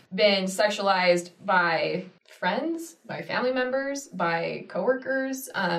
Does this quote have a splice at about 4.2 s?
no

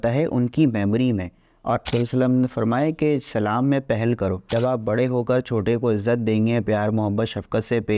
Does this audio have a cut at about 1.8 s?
yes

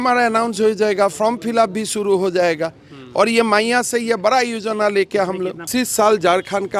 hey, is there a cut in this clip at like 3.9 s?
no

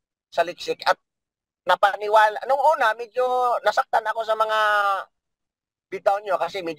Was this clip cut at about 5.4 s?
no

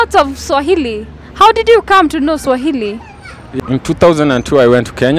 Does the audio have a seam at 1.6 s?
no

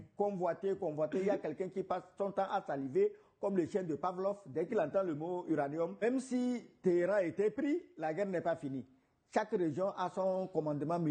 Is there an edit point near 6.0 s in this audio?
yes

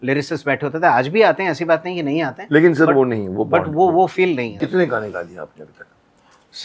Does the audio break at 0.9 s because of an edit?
no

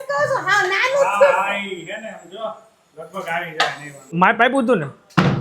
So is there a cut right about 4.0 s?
yes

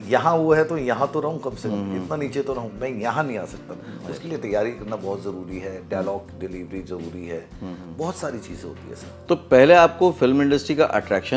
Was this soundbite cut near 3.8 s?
no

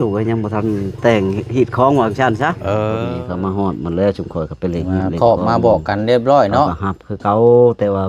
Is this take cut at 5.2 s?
no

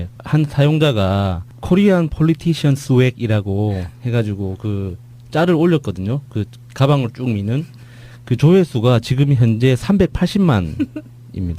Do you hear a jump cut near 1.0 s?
yes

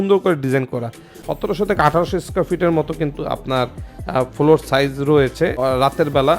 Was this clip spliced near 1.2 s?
yes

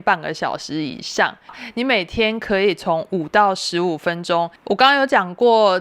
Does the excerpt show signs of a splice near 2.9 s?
no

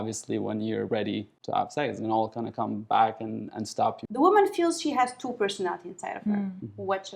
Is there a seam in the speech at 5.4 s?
no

